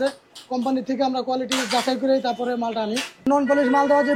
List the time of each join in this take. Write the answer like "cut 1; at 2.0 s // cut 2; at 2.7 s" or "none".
cut 1; at 3.2 s

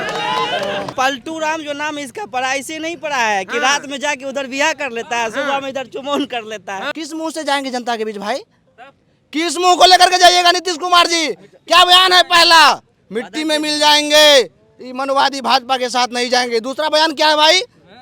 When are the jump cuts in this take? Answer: cut 1; at 0.9 s // cut 2; at 6.9 s

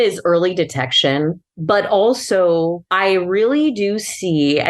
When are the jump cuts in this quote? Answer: cut 1; at 1.3 s // cut 2; at 2.8 s

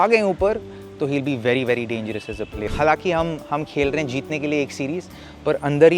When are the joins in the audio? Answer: cut 1; at 2.6 s

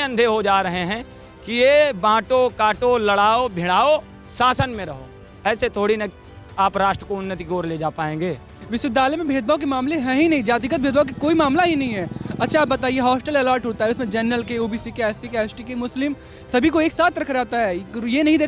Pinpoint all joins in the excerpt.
none

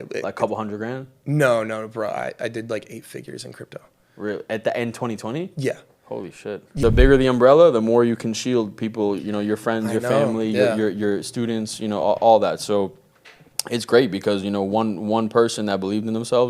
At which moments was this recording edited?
cut 1; at 6.8 s

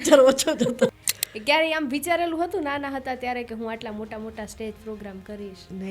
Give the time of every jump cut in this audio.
cut 1; at 0.9 s

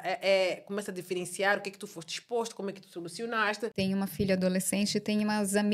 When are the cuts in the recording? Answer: cut 1; at 3.7 s

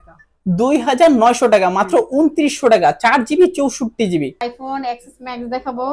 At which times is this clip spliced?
cut 1; at 4.4 s

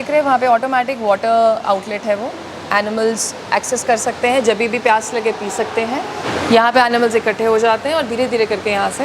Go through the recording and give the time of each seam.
cut 1; at 6.3 s

